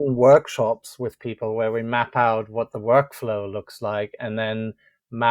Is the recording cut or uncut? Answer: uncut